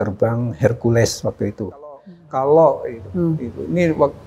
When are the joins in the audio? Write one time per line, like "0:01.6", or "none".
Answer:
0:02.1